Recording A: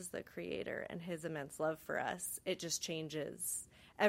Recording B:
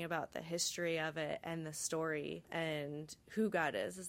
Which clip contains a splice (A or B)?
B